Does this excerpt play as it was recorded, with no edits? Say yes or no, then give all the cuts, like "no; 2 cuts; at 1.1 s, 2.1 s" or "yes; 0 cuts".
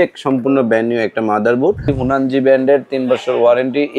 no; 1 cut; at 2.0 s